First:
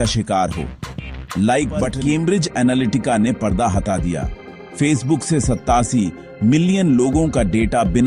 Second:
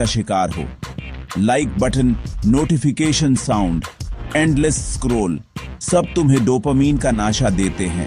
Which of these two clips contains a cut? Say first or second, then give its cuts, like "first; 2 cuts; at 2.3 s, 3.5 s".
first; 1 cut; at 1.9 s